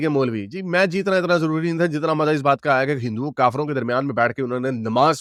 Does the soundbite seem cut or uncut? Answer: uncut